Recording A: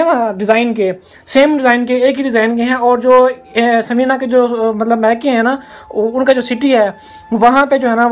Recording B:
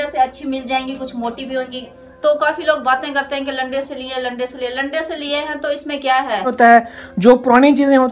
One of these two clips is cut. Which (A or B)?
B